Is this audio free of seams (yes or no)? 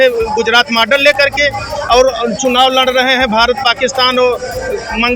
yes